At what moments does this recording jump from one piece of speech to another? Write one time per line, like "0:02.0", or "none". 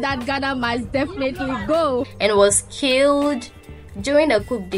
0:02.1